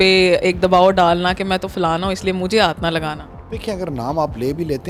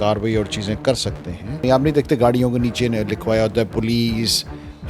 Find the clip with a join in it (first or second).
second